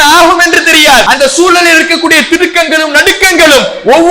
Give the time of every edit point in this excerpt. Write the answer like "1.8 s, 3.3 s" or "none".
1.0 s